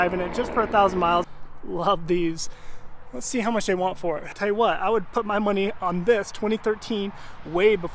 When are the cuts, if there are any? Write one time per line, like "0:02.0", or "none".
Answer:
0:01.2
0:04.3

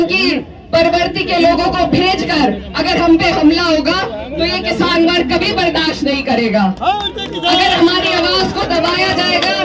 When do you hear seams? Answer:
none

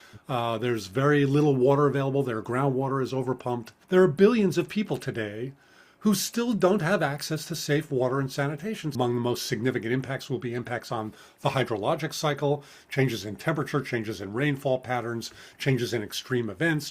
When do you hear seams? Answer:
0:03.7
0:08.9

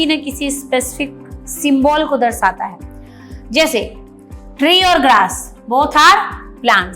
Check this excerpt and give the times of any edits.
none

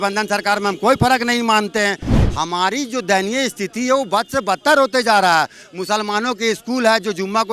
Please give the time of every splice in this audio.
0:02.1

